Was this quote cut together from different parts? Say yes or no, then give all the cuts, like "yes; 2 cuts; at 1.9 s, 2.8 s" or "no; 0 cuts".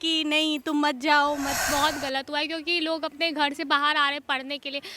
yes; 1 cut; at 1.6 s